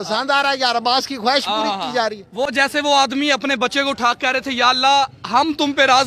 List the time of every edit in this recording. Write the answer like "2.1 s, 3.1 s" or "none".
none